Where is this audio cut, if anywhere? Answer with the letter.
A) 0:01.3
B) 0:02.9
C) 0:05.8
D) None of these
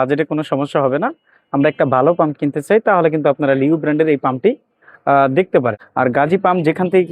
C